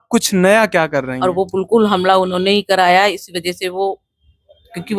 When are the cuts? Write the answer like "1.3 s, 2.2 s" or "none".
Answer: 1.1 s